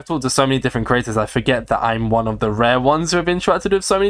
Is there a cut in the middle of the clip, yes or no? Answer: no